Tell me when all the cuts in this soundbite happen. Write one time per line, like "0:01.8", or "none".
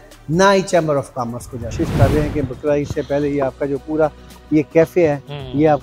0:01.7